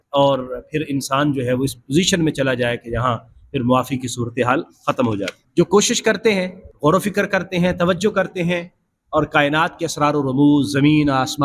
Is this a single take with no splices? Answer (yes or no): no